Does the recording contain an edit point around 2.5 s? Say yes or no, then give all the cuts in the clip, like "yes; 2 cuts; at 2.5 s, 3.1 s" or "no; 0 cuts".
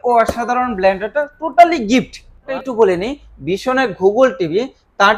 yes; 1 cut; at 2.5 s